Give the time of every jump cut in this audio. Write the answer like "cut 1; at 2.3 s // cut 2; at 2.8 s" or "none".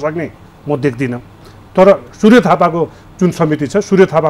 none

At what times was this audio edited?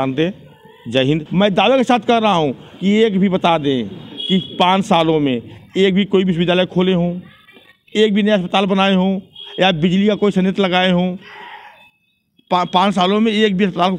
cut 1; at 1.3 s

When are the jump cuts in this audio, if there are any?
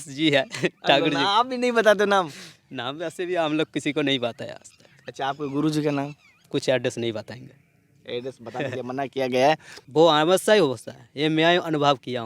cut 1; at 6.5 s // cut 2; at 9.7 s

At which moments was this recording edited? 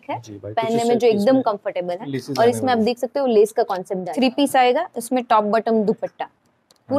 cut 1; at 4.1 s

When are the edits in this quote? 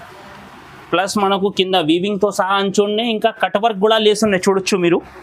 none

